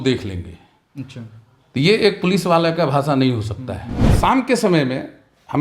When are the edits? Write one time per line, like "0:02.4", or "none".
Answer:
0:04.1